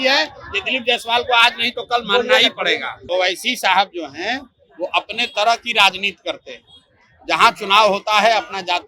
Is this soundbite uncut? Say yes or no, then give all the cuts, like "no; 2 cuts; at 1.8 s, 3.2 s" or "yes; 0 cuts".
no; 1 cut; at 3.0 s